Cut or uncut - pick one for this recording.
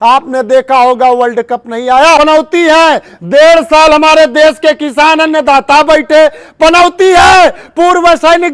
cut